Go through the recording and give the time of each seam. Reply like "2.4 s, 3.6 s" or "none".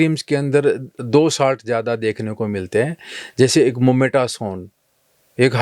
none